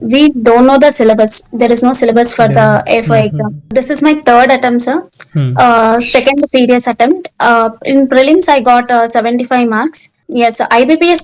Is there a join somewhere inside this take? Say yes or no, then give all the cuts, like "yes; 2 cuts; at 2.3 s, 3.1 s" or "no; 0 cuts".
yes; 2 cuts; at 3.7 s, 10.1 s